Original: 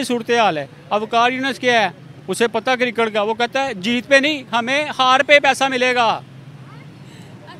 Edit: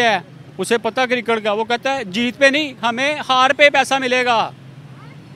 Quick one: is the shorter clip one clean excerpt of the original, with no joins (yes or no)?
yes